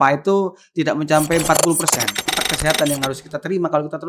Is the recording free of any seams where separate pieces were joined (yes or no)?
no